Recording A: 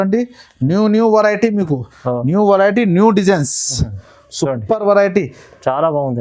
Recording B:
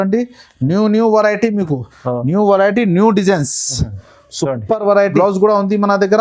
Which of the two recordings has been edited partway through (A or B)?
B